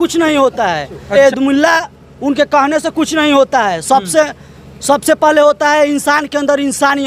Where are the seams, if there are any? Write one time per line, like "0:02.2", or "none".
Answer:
0:01.2